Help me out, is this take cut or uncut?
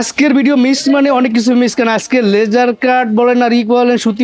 uncut